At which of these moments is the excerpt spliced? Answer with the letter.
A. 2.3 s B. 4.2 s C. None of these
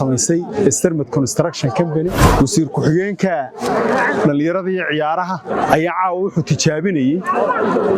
A